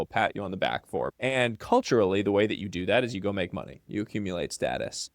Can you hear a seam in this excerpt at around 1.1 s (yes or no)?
yes